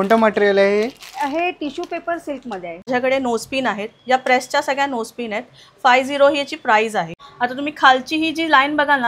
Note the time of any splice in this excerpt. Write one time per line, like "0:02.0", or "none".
0:02.9
0:07.1